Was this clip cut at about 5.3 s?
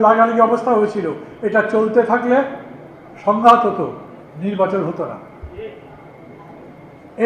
no; 0 cuts

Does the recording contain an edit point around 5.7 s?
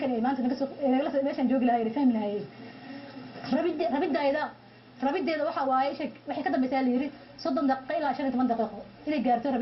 yes; 1 cut; at 5.7 s

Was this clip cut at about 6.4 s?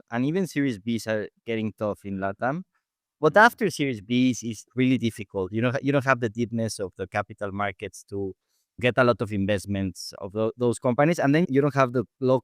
no; 2 cuts; at 8.8 s, 11.5 s

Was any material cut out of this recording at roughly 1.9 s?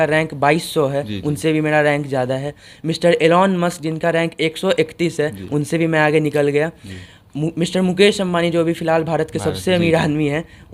no; 0 cuts

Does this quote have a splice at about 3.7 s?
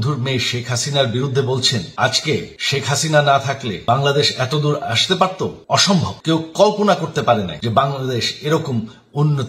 yes; 5 cuts; at 1.9 s, 2.6 s, 3.7 s, 5.8 s, 7.6 s

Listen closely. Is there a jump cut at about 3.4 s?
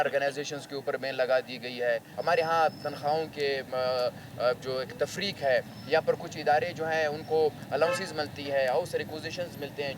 no; 1 cut; at 2.1 s

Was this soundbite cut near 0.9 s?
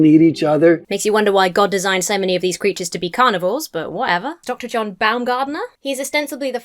yes; 2 cuts; at 0.9 s, 4.4 s

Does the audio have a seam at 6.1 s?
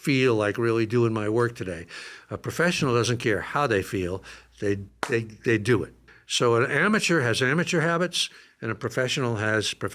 yes; 1 cut; at 6.1 s

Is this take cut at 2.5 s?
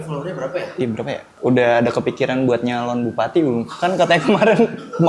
no; 1 cut; at 1.3 s

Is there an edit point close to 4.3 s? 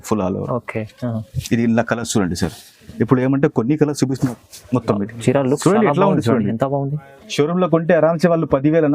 yes; 1 cut; at 4.3 s

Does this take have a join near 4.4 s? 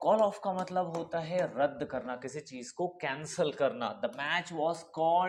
no; 0 cuts

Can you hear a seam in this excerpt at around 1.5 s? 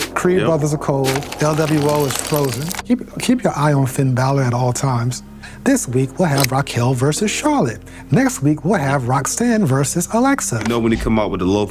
no; 3 cuts; at 2.8 s, 5.4 s, 10.7 s

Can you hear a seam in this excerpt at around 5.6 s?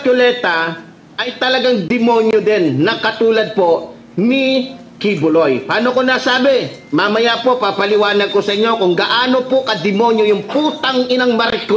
no; 0 cuts

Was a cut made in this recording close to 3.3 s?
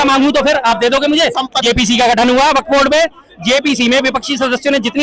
no; 1 cut; at 1.6 s

